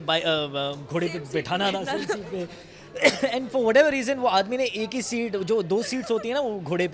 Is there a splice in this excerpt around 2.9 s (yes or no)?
no